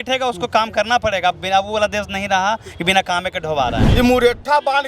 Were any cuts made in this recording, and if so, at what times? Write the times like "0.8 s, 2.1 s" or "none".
3.8 s